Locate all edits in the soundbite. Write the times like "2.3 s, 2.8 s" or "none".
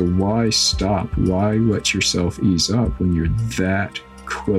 2.9 s

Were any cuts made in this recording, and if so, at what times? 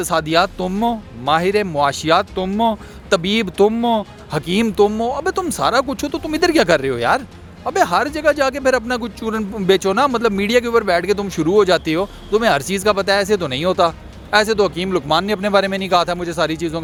none

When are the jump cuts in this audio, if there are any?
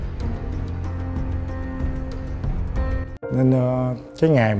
1.5 s, 3.0 s

